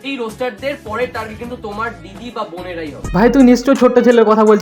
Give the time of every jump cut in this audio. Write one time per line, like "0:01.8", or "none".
0:03.0